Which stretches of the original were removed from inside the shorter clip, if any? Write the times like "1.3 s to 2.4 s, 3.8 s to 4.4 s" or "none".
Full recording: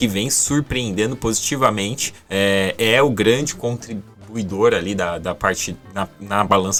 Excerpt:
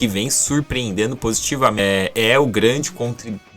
1.8 s to 2.4 s